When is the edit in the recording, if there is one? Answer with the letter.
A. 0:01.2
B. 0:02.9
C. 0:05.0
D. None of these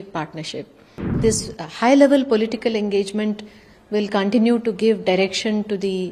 A